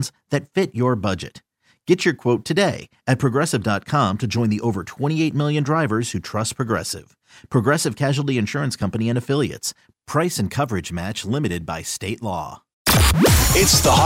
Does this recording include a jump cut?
yes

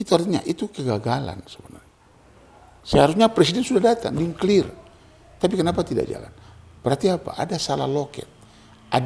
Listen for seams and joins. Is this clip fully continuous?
yes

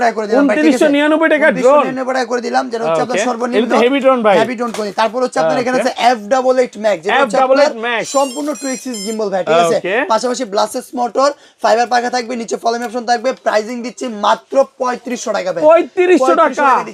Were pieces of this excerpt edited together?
no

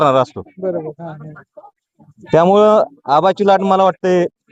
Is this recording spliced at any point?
no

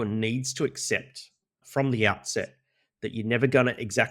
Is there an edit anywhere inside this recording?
yes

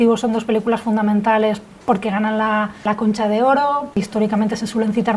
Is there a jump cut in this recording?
yes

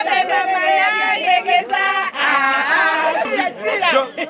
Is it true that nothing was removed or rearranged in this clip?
no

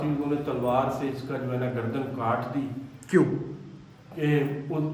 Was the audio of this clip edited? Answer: no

